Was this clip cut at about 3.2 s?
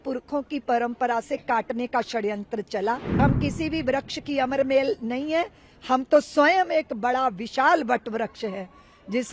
yes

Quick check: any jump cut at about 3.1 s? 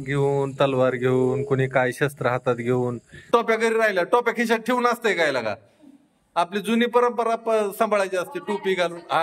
yes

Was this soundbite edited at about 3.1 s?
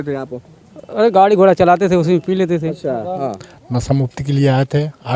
yes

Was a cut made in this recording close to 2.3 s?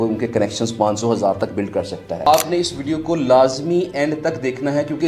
yes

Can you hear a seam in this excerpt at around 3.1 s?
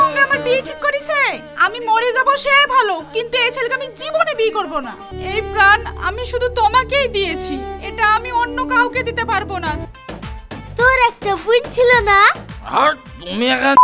no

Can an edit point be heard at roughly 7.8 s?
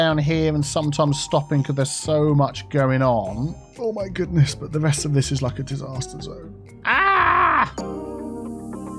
yes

